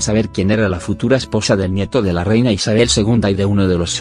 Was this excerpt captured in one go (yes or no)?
yes